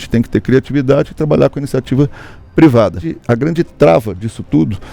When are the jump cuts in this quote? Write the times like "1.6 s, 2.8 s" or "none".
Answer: 3.1 s